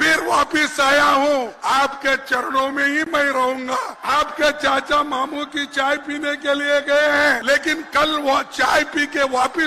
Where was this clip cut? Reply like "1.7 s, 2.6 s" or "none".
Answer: 1.5 s, 4.0 s, 7.4 s